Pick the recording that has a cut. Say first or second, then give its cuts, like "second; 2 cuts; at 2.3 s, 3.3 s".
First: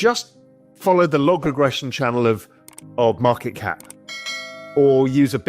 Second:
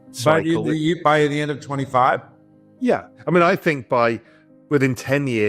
second; 1 cut; at 3.1 s